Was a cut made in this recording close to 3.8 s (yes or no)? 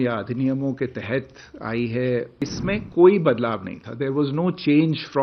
no